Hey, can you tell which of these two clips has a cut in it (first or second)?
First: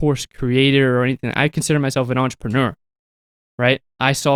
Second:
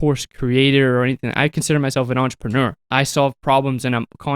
second